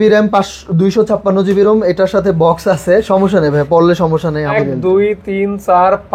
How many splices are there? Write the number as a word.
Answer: one